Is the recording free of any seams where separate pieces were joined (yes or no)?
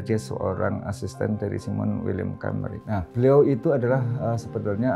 yes